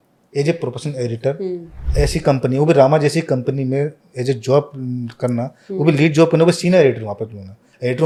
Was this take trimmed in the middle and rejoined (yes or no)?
no